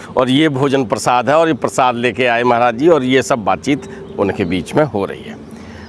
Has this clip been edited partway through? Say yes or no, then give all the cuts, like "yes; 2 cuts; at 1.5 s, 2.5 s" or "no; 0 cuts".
no; 0 cuts